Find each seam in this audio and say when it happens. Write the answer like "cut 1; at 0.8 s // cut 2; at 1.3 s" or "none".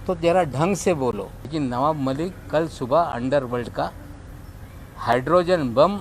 cut 1; at 1.3 s